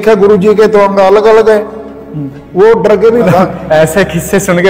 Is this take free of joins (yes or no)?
no